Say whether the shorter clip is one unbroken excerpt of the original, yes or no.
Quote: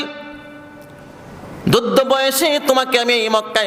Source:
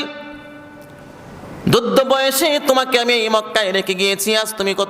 yes